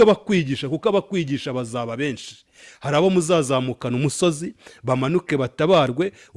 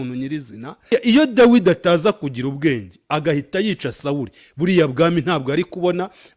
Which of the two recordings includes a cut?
second; 1 cut; at 0.9 s

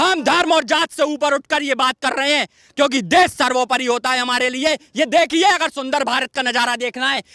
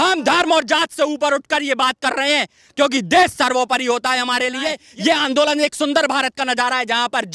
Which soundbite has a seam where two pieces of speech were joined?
second; 1 cut; at 4.8 s

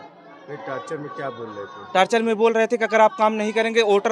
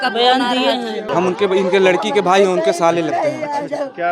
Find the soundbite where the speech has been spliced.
second; 1 cut; at 1.0 s

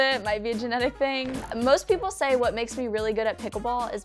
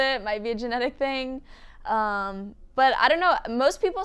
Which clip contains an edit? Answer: first; 1 cut; at 1.5 s

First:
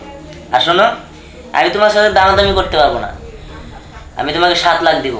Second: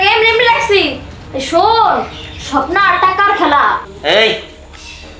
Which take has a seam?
second; 1 cut; at 3.9 s

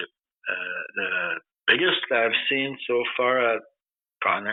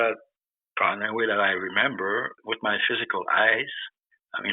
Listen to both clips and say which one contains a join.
second; 1 cut; at 2.4 s

